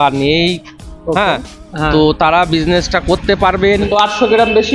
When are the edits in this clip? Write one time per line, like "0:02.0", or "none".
0:03.7